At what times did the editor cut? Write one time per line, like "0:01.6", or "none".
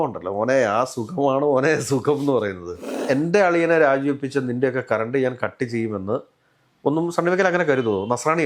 0:02.9